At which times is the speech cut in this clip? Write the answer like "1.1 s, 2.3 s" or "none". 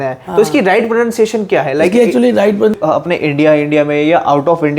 2.8 s

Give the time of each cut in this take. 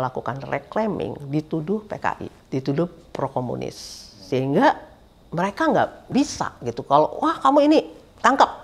2.3 s, 6.1 s

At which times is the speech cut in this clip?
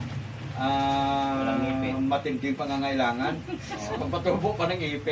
4.0 s

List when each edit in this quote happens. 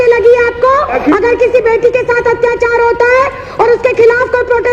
0.9 s

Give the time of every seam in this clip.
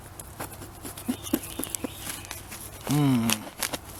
none

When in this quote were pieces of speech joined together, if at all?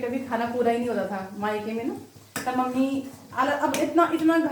none

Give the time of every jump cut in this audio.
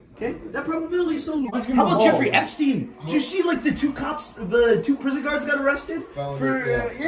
2.2 s

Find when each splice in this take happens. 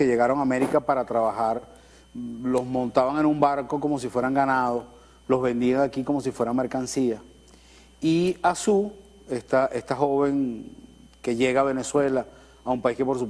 none

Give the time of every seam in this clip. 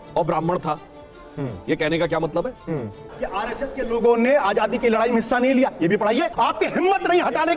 3.1 s, 6.3 s

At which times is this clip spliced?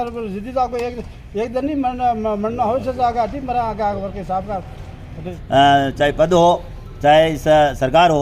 5.3 s

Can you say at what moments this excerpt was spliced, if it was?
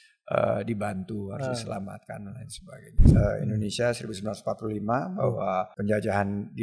3.2 s, 5.7 s

